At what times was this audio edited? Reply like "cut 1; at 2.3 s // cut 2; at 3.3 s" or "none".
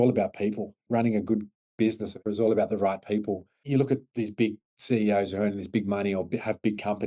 cut 1; at 0.8 s // cut 2; at 2.2 s // cut 3; at 3.5 s // cut 4; at 4.7 s